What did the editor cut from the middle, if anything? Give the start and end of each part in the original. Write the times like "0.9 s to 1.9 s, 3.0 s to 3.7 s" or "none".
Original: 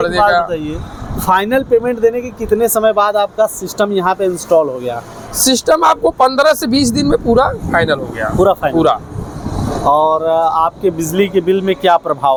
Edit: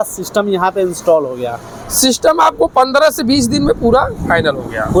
none

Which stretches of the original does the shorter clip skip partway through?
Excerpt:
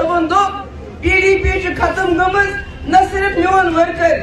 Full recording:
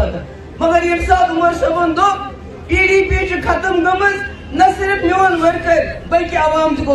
none

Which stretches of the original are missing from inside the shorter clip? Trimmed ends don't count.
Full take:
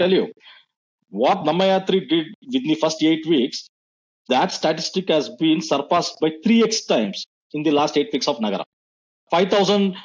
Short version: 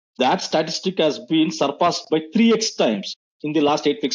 none

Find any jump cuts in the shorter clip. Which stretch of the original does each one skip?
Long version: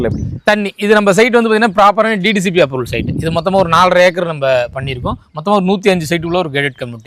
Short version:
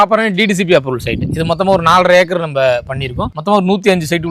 5.2 s to 5.3 s

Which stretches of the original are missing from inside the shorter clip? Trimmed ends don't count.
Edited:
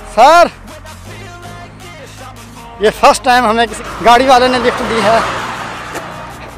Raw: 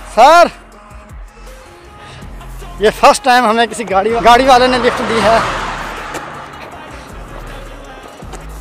3.9 s to 4.1 s

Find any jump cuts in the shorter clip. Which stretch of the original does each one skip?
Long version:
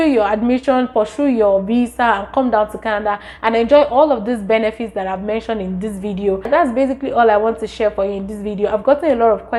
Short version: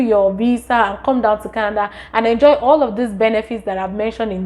none

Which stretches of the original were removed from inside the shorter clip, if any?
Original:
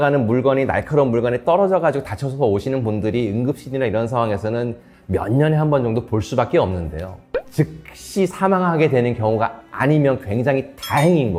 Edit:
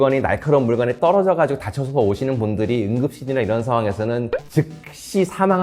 4.7 s to 7.3 s

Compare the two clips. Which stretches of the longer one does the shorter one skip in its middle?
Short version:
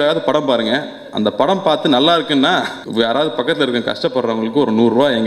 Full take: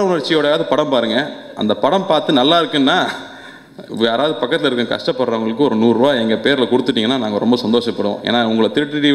3.2 s to 3.8 s

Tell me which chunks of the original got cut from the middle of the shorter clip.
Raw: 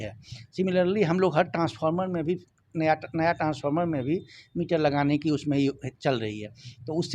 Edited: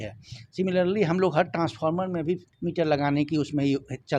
2.5 s to 4.5 s

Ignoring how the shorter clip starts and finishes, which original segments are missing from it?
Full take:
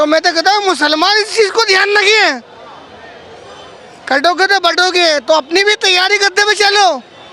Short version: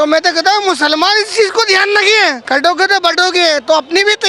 2.4 s to 4.0 s

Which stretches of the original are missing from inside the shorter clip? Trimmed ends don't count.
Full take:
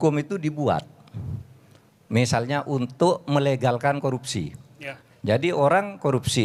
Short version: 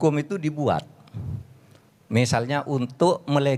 none

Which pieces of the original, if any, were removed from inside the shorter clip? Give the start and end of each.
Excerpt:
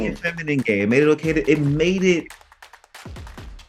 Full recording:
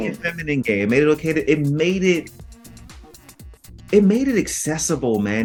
none

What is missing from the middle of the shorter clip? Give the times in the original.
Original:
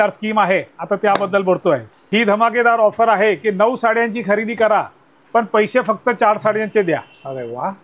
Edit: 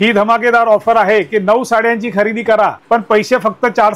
4.9 s to 5.2 s

